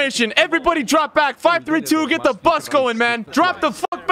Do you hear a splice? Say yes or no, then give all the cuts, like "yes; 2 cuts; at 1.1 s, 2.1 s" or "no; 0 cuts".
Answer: yes; 1 cut; at 3.2 s